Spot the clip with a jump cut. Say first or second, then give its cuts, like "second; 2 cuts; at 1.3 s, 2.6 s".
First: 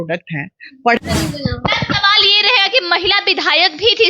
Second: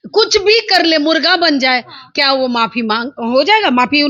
first; 1 cut; at 1.0 s